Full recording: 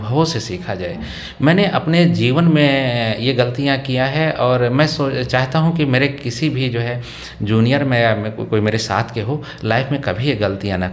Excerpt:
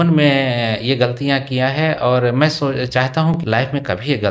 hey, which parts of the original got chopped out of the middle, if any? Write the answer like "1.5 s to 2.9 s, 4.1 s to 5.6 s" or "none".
5.7 s to 9.5 s